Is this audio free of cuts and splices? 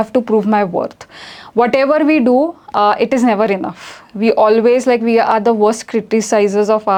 yes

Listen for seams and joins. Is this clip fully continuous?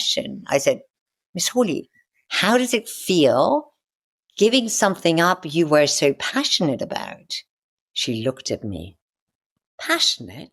yes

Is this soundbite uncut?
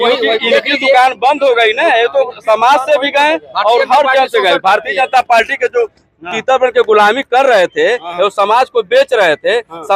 yes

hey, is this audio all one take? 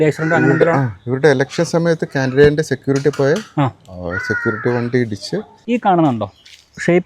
no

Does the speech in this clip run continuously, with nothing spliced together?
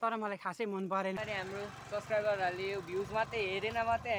no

